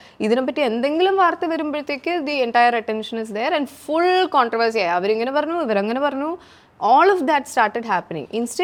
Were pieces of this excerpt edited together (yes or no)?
no